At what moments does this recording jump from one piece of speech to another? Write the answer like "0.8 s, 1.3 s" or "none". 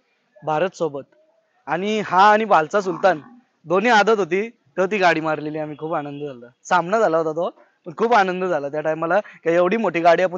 none